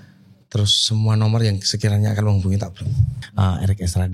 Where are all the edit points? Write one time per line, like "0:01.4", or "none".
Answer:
0:03.2